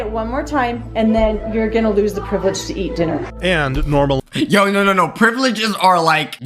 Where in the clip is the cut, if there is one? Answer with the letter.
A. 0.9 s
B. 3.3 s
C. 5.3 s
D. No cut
D